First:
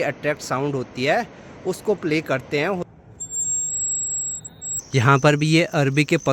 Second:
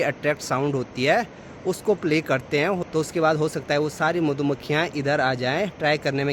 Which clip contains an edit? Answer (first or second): first